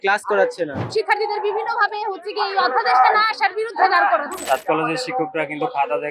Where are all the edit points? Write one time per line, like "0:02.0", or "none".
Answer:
0:00.8
0:04.3